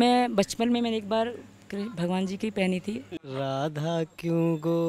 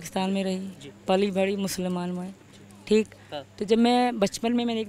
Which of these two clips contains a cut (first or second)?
first